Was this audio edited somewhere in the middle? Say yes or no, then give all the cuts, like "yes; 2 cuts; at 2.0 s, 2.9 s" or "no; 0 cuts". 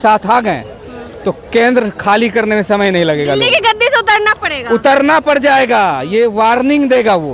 no; 0 cuts